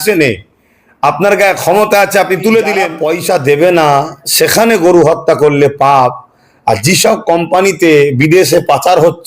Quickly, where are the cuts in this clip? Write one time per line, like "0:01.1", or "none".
0:03.0